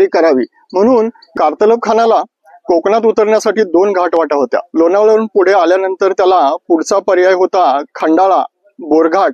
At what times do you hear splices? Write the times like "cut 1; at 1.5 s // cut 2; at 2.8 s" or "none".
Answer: cut 1; at 1.2 s

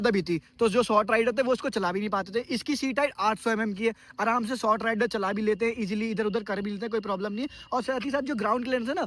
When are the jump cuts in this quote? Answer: none

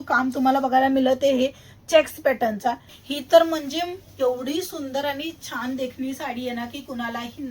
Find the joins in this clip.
cut 1; at 2.9 s

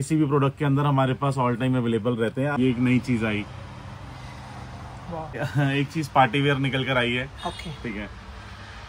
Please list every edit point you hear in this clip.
cut 1; at 2.6 s // cut 2; at 5.4 s

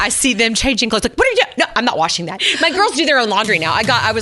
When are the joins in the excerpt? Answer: cut 1; at 2.4 s

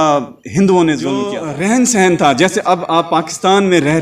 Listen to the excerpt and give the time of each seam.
cut 1; at 1.4 s

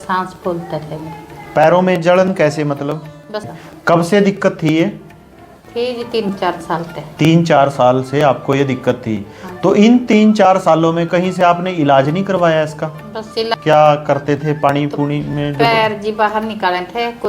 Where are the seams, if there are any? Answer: cut 1; at 3.5 s // cut 2; at 13.5 s

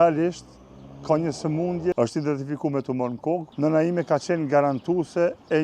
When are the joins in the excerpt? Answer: cut 1; at 1.9 s // cut 2; at 3.5 s

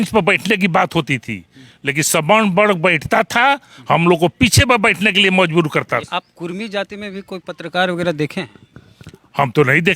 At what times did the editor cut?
cut 1; at 6.1 s

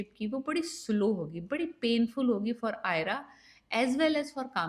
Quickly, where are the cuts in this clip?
none

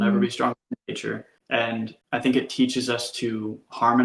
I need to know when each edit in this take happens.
cut 1; at 1.3 s // cut 2; at 2.0 s

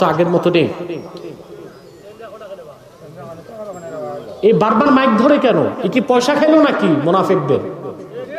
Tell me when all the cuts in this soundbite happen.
none

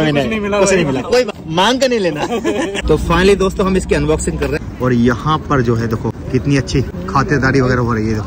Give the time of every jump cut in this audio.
cut 1; at 1.4 s // cut 2; at 2.8 s // cut 3; at 4.6 s // cut 4; at 6.2 s // cut 5; at 6.9 s

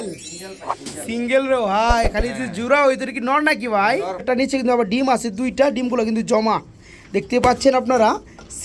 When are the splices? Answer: cut 1; at 4.4 s

